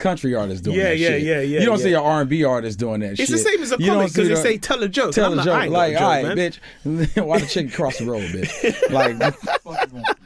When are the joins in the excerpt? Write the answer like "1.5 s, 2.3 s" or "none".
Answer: none